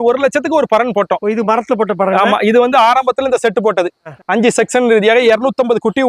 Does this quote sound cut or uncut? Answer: uncut